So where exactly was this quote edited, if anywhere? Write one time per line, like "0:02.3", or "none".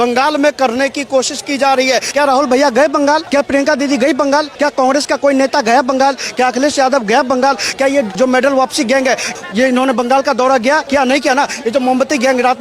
0:02.1
0:03.2
0:04.5
0:08.1
0:09.4
0:10.8